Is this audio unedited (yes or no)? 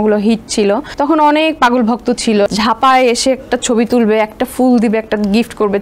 no